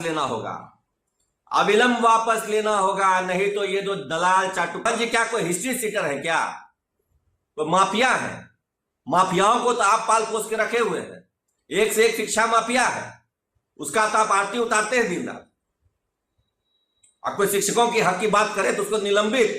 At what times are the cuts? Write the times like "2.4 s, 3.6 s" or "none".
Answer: 4.9 s